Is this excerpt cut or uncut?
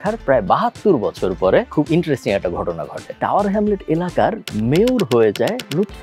cut